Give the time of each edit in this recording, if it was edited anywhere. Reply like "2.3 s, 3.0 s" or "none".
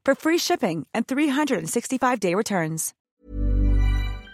3.0 s